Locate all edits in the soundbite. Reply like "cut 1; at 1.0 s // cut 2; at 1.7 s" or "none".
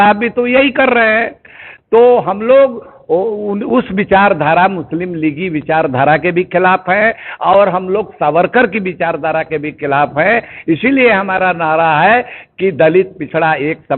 none